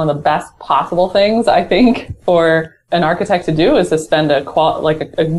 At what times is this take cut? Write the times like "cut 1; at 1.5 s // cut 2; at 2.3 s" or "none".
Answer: cut 1; at 2.8 s